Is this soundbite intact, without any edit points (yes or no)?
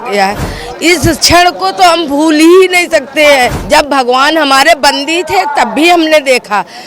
no